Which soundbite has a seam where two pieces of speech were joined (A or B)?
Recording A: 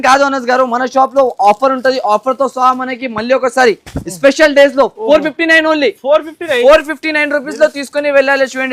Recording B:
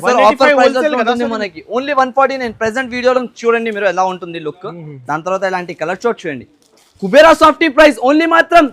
B